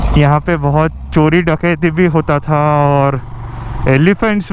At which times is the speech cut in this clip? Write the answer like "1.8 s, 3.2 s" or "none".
none